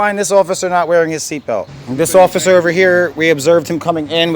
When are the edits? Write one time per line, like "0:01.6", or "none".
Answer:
0:01.8